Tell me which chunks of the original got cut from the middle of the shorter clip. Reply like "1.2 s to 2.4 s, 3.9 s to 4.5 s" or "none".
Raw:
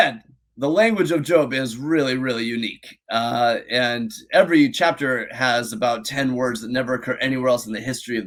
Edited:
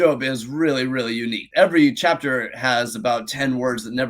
2.7 s to 4.2 s

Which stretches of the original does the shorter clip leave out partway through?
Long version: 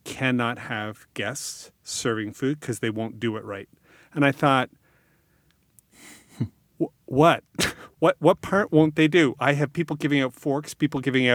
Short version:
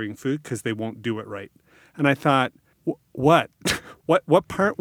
4.8 s to 6.6 s

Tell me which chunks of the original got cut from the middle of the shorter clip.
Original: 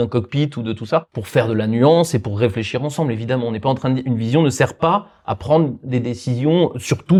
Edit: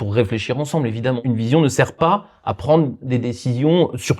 3.5 s to 4.0 s

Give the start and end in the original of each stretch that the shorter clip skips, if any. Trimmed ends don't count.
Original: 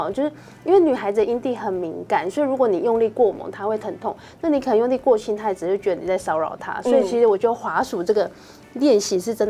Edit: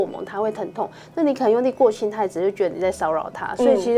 none

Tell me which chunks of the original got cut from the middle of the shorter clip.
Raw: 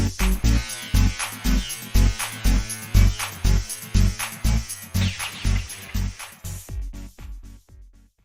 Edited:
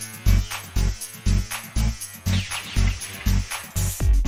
none

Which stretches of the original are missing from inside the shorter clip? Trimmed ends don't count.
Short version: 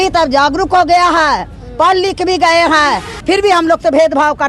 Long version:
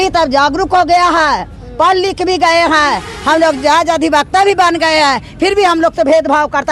3.1 s to 5.3 s

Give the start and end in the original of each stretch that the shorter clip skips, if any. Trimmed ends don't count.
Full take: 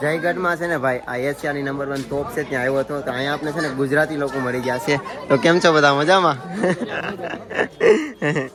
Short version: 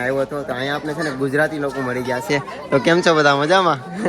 none

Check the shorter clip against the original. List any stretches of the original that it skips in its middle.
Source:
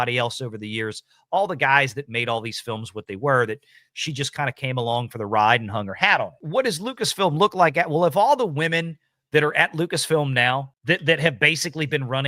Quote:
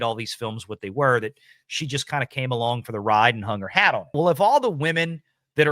6.4 s to 7.9 s

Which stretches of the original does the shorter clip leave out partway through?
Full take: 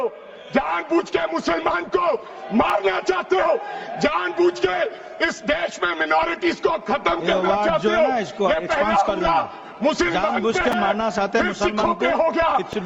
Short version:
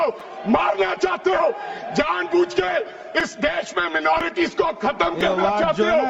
none

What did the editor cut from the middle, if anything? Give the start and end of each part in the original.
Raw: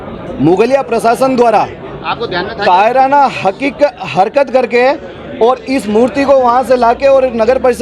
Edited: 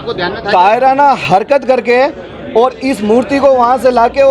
3.3 s to 4.1 s

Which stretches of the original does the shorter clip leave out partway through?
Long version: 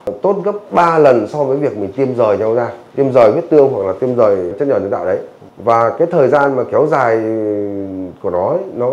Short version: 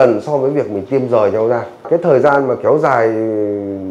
2.9 s to 5.9 s

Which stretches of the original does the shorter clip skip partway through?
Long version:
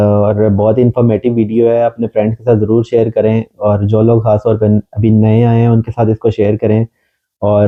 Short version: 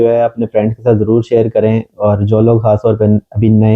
none

